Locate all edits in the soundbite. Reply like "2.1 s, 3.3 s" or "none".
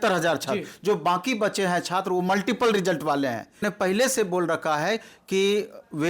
3.6 s